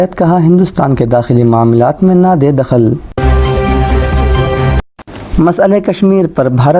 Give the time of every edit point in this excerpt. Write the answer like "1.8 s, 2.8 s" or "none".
3.2 s, 4.6 s

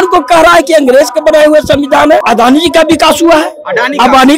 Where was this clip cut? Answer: 2.2 s

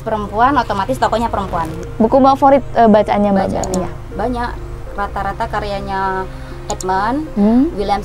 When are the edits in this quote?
1.8 s

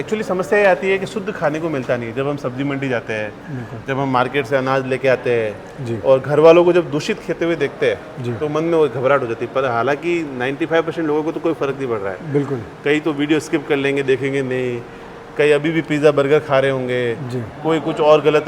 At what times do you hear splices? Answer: none

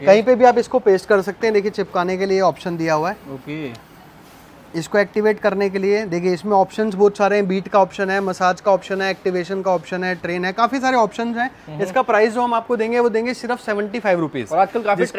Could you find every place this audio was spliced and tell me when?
none

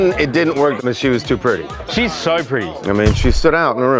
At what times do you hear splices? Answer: none

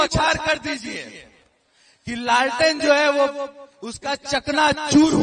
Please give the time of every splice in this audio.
none

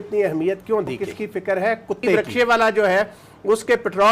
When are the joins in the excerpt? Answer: 1.0 s, 2.1 s

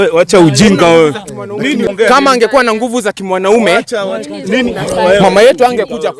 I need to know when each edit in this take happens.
1.9 s

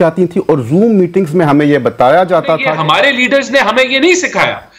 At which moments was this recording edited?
2.7 s

